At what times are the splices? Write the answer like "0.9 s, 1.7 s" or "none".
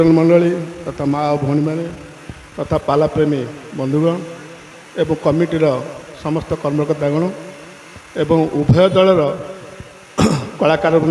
none

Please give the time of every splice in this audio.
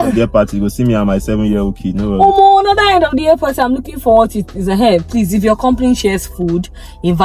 none

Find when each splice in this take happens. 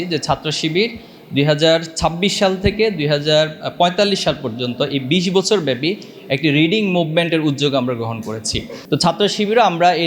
8.7 s

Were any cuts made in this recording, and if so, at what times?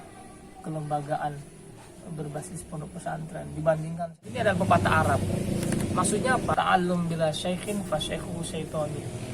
4.3 s, 6.5 s

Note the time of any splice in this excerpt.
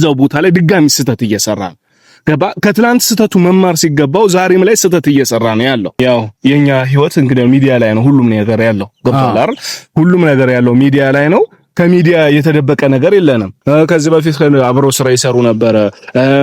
6.0 s, 13.5 s

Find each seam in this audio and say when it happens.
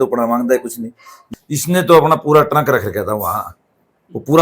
1.2 s

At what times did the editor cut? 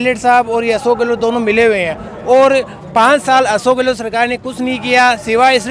none

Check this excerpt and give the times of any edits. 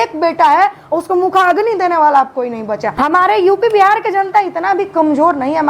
2.9 s

